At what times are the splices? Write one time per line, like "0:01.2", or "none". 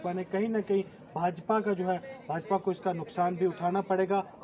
none